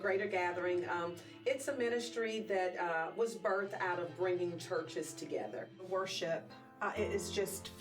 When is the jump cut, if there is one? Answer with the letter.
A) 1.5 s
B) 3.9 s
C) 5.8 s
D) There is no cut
C